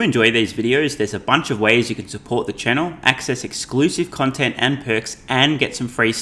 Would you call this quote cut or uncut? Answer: uncut